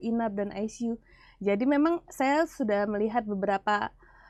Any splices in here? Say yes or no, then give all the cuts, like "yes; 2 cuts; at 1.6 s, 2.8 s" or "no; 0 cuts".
no; 0 cuts